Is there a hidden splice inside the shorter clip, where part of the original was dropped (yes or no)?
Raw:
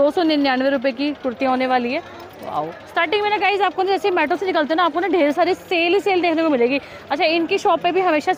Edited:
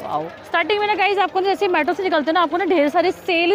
no